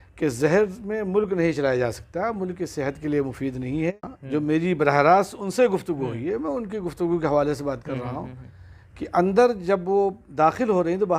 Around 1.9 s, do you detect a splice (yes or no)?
no